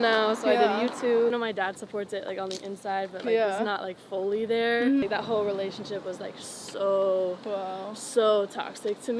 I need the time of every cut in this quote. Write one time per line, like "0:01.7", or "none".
0:01.3
0:05.0